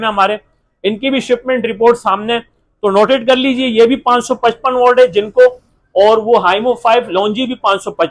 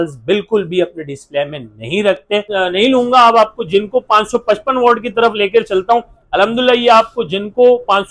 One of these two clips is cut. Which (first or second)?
second